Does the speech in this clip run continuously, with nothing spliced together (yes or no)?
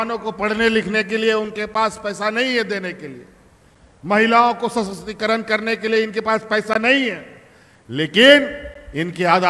yes